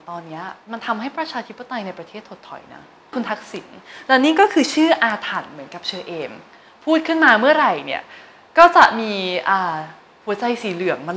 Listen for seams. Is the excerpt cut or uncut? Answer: cut